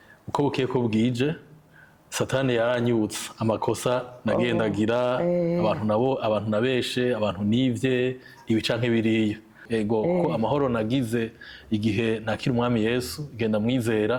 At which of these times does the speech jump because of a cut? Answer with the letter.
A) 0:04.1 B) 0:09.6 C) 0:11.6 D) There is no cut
B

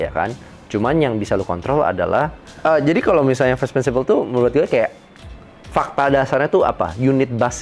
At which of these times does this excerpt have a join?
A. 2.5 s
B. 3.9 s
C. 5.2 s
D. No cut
A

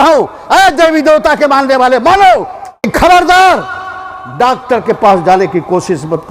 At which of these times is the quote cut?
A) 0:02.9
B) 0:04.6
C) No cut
A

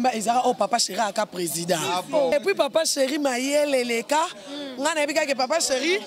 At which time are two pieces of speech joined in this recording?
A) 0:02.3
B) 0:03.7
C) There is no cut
A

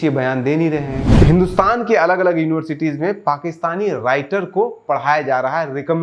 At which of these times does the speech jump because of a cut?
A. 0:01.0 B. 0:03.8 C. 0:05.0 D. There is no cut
A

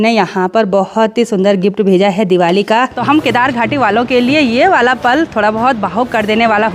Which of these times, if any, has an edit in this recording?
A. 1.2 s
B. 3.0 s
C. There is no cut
B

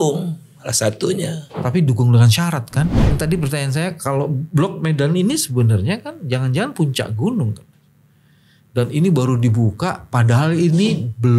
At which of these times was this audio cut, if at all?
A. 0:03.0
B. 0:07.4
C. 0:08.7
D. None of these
A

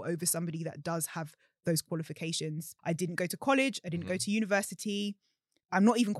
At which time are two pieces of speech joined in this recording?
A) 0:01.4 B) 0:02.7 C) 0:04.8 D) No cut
B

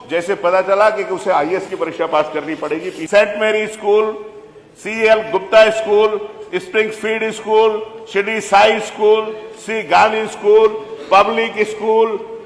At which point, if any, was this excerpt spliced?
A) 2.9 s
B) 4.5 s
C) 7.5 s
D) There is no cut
A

